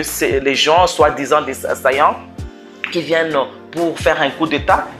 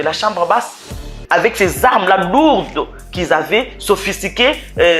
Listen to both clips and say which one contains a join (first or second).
second